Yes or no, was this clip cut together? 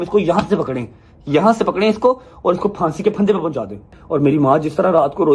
yes